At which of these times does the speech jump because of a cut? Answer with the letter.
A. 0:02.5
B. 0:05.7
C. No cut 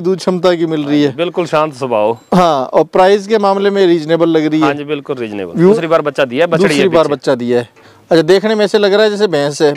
B